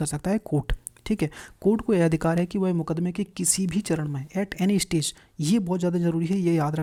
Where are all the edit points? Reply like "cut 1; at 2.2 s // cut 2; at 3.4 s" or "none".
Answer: none